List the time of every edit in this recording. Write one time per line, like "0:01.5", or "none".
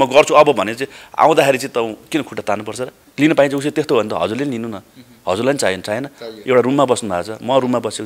0:03.0